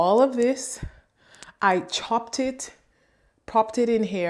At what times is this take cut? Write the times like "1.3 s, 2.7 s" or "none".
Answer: none